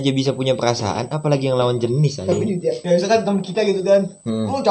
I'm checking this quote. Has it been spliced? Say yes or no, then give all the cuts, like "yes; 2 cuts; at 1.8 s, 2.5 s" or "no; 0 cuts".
yes; 1 cut; at 2.8 s